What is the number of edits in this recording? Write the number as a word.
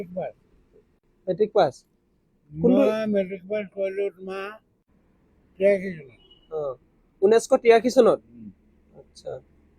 one